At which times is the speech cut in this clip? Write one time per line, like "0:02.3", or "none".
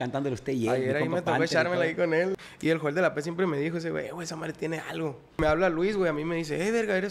0:02.4
0:05.4

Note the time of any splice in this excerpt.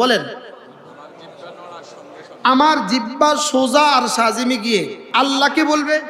0:05.1

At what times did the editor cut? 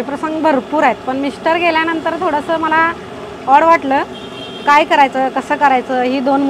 none

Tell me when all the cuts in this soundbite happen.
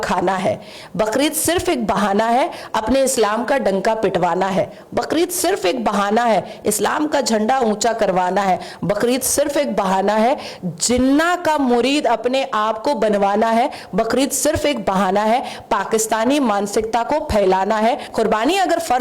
0:18.1

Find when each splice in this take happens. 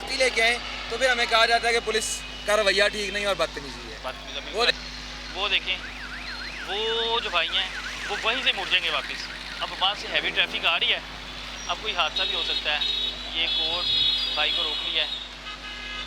0:04.7

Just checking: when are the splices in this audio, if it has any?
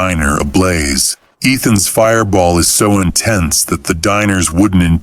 none

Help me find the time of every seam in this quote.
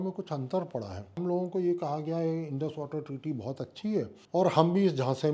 0:01.2
0:04.2

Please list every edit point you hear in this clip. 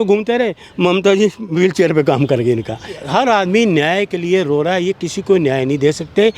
0:03.0

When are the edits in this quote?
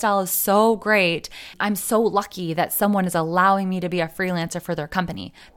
none

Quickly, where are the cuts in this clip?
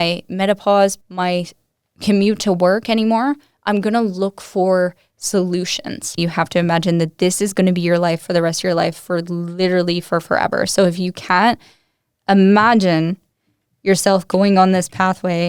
0:01.0
0:06.2

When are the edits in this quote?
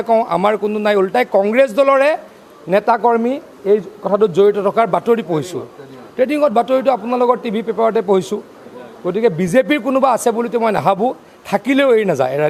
none

